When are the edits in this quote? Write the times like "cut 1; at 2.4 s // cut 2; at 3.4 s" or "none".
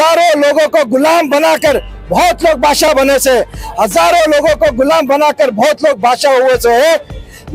none

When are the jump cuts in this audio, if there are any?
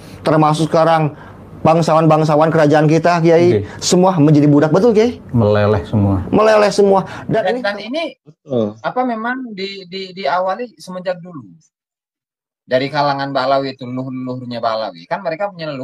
cut 1; at 7.5 s

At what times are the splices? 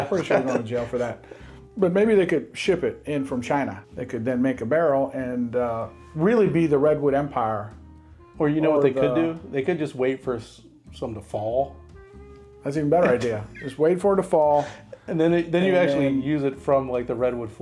cut 1; at 3.9 s

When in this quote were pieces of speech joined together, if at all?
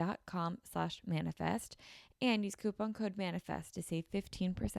none

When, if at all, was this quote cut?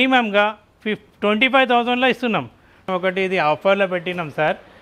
cut 1; at 2.8 s

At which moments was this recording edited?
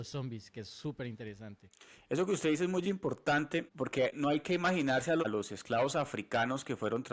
none

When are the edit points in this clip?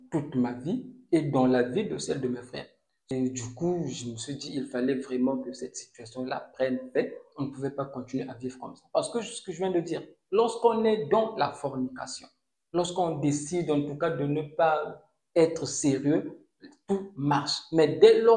cut 1; at 3.1 s

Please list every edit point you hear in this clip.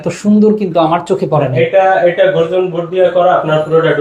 none

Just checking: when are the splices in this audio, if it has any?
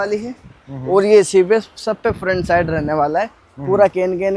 none

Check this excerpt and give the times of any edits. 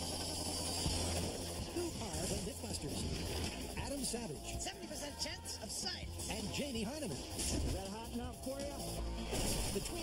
cut 1; at 3.3 s

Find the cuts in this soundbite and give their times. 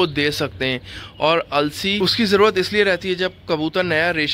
cut 1; at 2.0 s

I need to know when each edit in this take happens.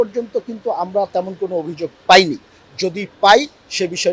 none

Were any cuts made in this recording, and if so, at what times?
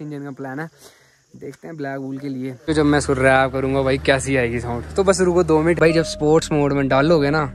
cut 1; at 2.7 s // cut 2; at 5.8 s

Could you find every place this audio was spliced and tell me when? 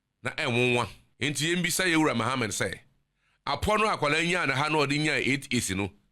cut 1; at 1.0 s

